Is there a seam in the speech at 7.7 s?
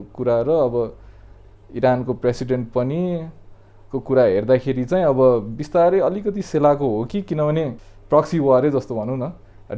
yes; 1 cut; at 7.7 s

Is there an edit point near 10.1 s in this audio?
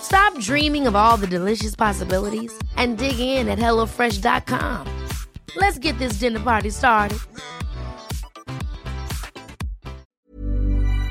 yes; 1 cut; at 10.1 s

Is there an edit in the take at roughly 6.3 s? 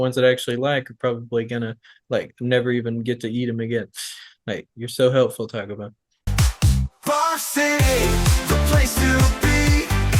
yes; 1 cut; at 6.3 s

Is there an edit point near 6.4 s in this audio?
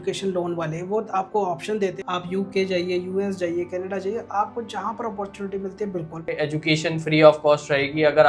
yes; 2 cuts; at 2.0 s, 6.4 s

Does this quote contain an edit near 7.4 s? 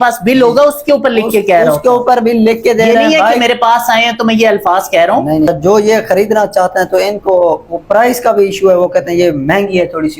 no; 1 cut; at 5.5 s

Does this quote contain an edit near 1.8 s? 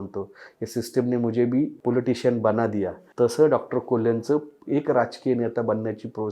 yes; 3 cuts; at 1.8 s, 3.0 s, 4.6 s

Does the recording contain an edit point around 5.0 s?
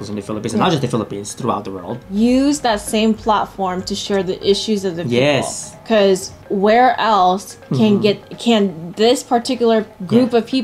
no; 1 cut; at 1.9 s

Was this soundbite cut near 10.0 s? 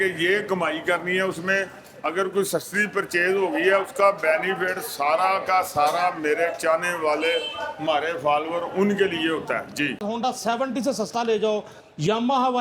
yes; 1 cut; at 10.0 s

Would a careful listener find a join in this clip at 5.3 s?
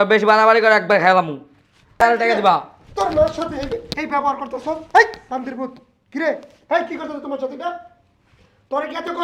no; 1 cut; at 2.0 s

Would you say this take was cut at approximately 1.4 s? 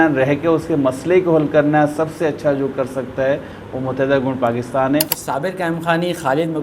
no; 1 cut; at 5.1 s

